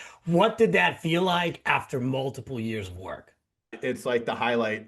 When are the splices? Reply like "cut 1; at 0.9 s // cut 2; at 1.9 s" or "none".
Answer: cut 1; at 3.8 s